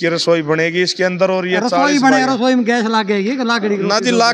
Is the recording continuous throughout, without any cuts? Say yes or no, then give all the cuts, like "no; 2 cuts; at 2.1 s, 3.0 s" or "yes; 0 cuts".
yes; 0 cuts